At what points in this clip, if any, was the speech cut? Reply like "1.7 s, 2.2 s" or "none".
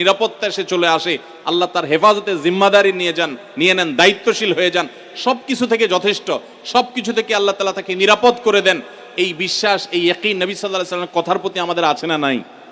none